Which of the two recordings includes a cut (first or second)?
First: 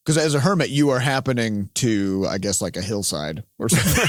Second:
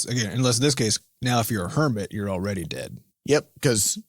second